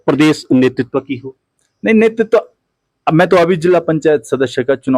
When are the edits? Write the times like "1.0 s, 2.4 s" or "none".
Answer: none